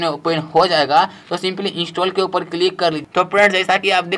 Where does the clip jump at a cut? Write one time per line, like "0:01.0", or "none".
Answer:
0:03.0